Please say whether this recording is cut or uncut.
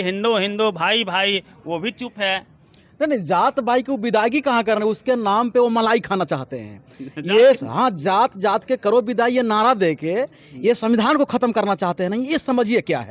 uncut